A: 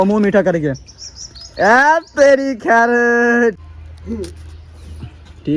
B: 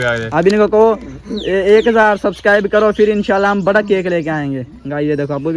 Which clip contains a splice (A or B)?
A